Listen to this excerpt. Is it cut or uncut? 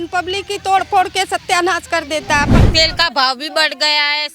cut